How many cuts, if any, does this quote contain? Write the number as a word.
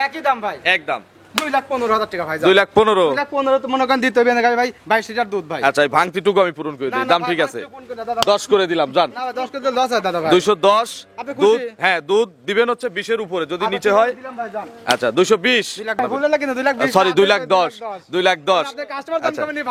one